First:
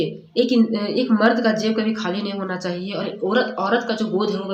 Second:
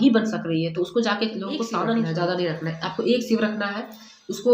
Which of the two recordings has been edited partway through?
second; 1 cut; at 2.1 s

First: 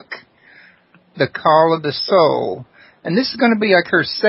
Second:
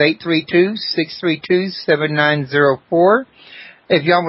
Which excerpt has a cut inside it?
first; 1 cut; at 3.3 s

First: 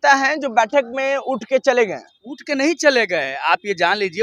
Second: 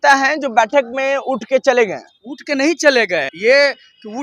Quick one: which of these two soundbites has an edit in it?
second; 1 cut; at 3.3 s

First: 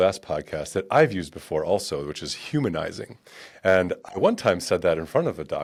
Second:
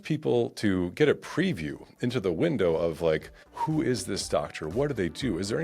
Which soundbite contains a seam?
second; 1 cut; at 3.4 s

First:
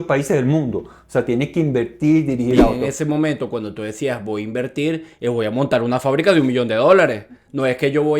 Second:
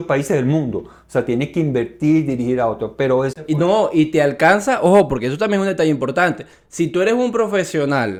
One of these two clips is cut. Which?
first; 1 cut; at 2.8 s

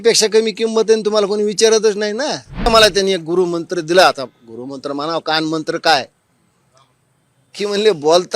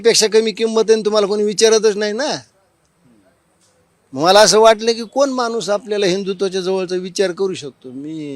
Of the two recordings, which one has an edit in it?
first; 1 cut; at 2.7 s

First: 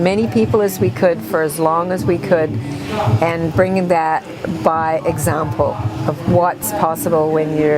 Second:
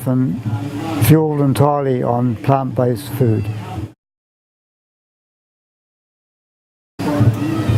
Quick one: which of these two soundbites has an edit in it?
first; 1 cut; at 2.2 s

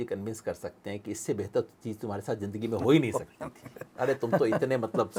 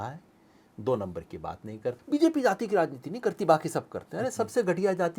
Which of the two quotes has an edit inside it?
second; 1 cut; at 2.0 s

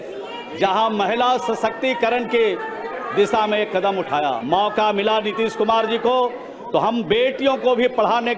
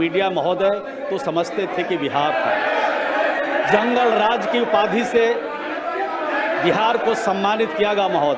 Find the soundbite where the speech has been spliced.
first; 1 cut; at 4.4 s

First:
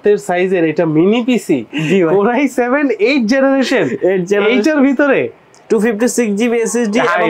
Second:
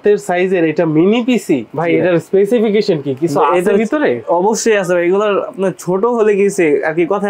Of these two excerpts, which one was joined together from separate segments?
first; 1 cut; at 1.7 s

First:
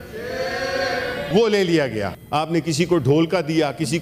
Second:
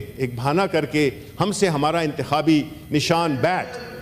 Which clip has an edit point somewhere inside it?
first; 2 cuts; at 1.3 s, 2.2 s

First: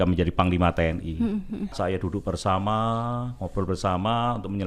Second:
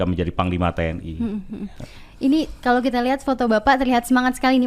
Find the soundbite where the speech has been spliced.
first; 1 cut; at 1.8 s

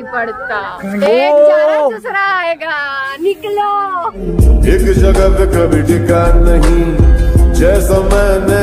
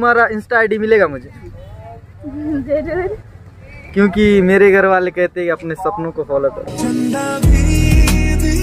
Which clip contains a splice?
first; 1 cut; at 4.2 s

